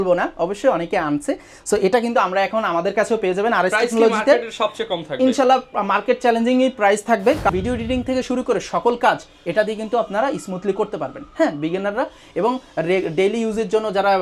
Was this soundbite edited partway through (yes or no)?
yes